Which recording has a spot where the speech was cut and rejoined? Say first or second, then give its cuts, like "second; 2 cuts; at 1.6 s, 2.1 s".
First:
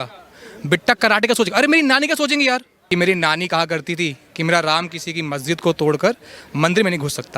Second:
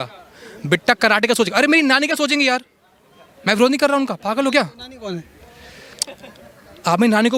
first; 1 cut; at 2.7 s